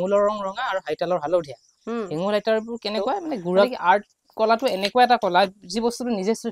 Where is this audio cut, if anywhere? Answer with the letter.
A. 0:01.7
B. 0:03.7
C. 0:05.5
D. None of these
B